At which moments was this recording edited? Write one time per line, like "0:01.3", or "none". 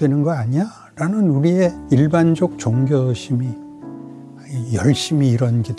0:01.8